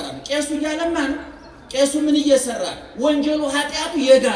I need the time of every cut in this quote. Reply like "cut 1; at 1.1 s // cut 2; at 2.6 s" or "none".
none